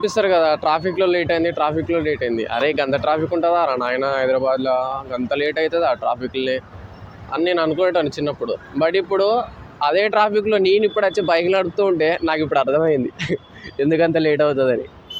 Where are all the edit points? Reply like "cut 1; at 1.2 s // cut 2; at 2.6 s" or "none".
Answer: none

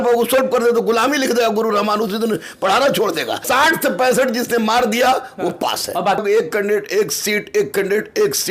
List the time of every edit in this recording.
cut 1; at 3.4 s // cut 2; at 6.2 s

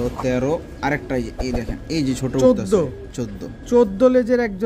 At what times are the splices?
none

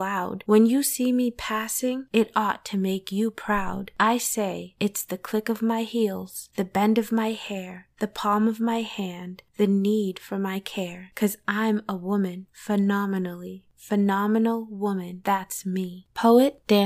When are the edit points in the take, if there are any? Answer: cut 1; at 15.9 s

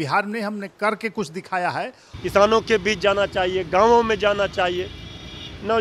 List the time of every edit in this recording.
cut 1; at 2.0 s

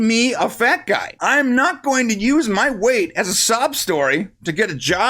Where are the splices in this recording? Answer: cut 1; at 1.1 s

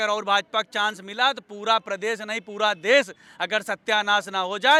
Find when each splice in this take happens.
none

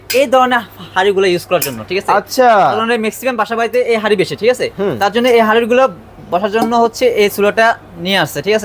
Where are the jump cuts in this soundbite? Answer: none

